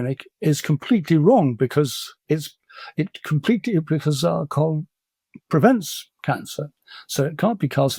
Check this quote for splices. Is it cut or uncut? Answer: uncut